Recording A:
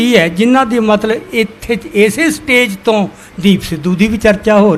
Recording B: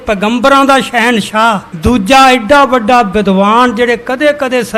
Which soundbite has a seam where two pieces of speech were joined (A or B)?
B